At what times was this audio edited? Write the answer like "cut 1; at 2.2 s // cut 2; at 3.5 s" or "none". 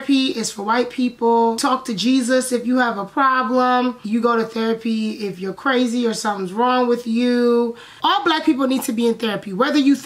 cut 1; at 1.6 s // cut 2; at 4.0 s // cut 3; at 7.8 s